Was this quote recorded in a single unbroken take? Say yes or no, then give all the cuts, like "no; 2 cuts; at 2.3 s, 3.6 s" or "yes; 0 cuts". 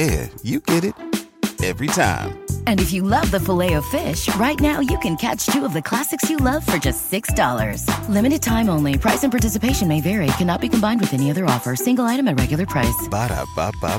yes; 0 cuts